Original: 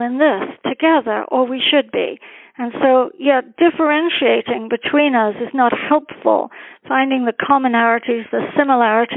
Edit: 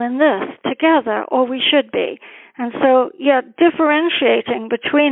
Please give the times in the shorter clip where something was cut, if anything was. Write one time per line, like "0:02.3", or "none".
none